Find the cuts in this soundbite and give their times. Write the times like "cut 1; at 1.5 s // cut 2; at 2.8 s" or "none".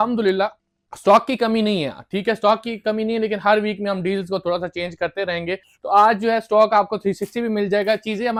none